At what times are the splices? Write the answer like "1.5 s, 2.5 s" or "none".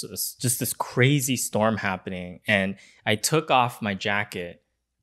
none